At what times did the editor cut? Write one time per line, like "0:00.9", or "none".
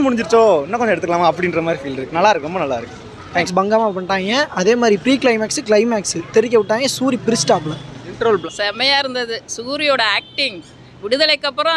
0:03.5
0:08.4